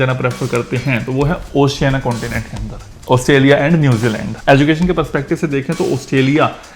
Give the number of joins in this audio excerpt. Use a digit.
2